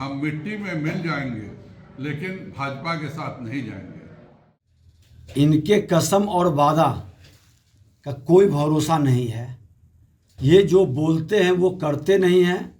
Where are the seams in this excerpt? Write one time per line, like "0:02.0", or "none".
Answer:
0:04.3